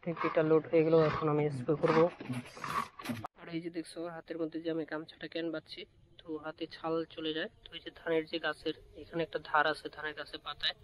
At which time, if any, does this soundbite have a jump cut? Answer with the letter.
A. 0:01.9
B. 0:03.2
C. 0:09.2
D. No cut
B